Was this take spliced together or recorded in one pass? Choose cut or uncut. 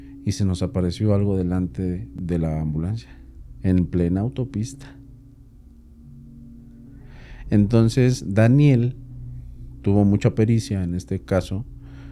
cut